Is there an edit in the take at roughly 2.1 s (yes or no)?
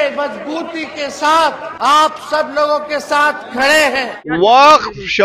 yes